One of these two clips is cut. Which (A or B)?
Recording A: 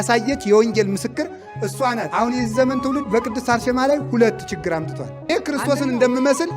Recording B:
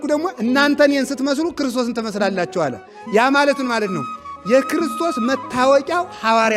A